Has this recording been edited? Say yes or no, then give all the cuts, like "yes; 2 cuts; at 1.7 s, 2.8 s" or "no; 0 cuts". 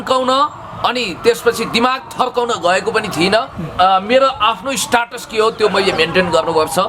yes; 1 cut; at 3.6 s